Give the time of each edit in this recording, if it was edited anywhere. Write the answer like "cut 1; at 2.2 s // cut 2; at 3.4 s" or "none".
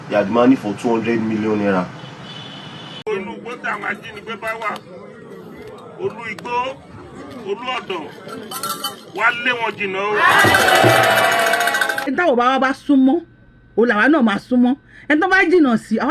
cut 1; at 2.9 s // cut 2; at 11.9 s